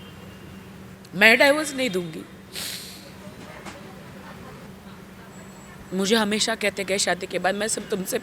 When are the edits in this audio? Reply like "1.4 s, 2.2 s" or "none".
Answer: 4.7 s